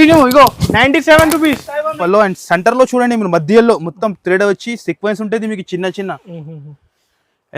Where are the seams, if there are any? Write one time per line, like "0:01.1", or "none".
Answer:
0:01.9